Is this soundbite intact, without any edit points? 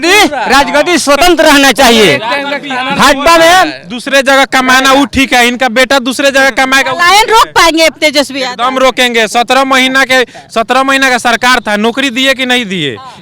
yes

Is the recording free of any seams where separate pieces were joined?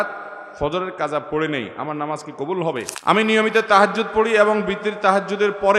no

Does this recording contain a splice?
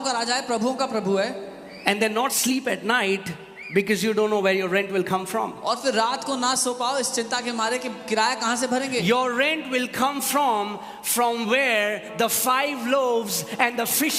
no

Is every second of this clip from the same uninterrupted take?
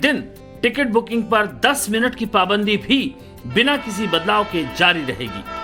no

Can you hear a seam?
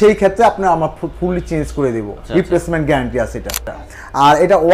yes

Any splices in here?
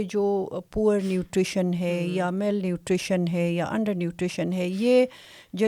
no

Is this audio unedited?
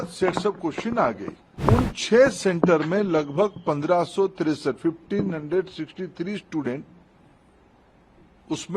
no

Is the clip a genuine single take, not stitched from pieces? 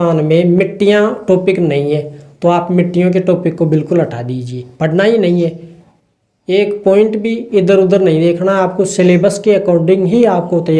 yes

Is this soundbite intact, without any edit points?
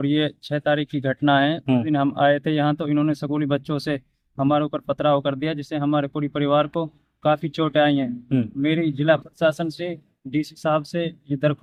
yes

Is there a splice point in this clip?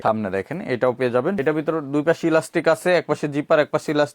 yes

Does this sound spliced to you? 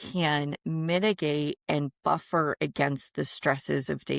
no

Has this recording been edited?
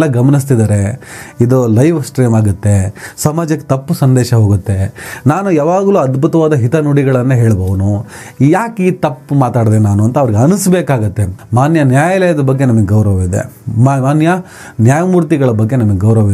no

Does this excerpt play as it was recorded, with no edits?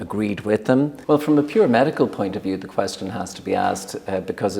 no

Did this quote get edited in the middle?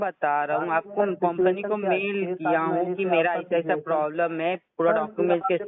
no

